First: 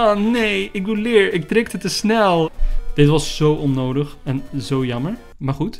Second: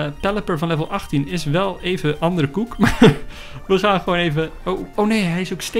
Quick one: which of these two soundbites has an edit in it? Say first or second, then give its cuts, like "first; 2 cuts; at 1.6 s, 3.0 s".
first; 1 cut; at 2.5 s